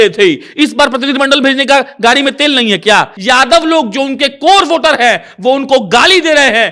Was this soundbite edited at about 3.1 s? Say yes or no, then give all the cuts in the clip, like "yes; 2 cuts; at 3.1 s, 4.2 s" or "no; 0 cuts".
yes; 1 cut; at 3.1 s